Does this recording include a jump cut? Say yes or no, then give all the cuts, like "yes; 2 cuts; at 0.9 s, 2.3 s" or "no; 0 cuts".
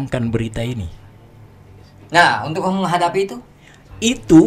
no; 0 cuts